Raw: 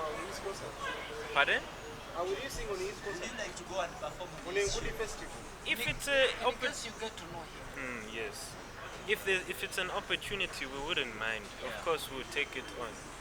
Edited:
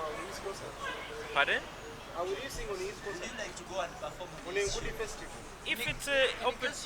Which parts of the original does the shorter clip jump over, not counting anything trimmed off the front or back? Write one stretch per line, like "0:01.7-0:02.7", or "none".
none